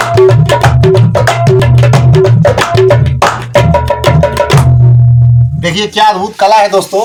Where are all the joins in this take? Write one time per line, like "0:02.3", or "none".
none